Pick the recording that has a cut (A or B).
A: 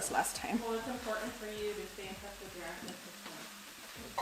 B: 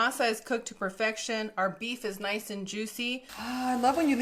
B